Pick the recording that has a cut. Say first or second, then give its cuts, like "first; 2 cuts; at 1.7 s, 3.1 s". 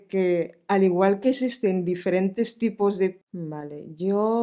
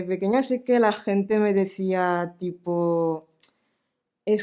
first; 1 cut; at 3.2 s